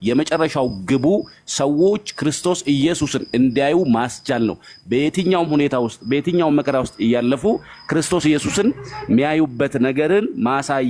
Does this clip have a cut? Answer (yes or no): no